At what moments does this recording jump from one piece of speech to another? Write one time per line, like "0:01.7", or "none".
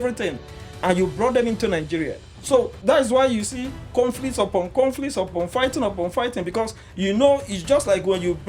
0:02.8